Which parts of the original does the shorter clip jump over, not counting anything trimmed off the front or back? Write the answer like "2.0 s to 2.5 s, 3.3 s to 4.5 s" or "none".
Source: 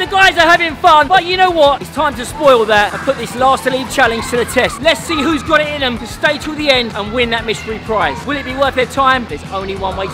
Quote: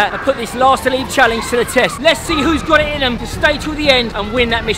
none